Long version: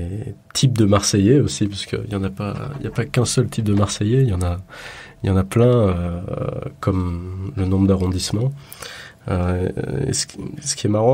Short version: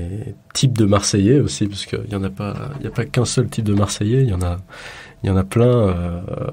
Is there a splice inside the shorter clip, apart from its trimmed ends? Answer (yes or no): no